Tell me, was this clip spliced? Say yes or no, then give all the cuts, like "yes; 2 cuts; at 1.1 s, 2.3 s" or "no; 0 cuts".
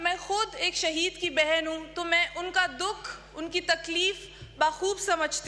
no; 0 cuts